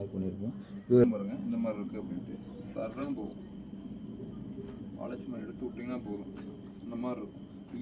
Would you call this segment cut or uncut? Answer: cut